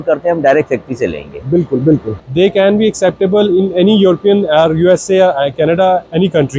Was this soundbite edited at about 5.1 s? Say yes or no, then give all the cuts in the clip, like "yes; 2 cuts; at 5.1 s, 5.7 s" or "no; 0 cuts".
no; 1 cut; at 2.1 s